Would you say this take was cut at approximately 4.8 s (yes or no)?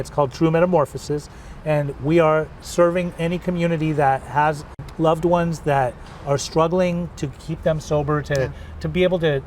yes